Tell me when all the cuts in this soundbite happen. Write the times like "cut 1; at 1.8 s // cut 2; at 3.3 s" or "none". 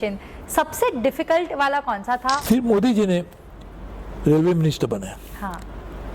cut 1; at 2.4 s